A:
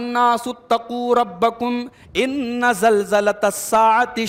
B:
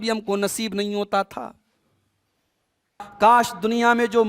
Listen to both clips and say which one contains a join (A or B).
B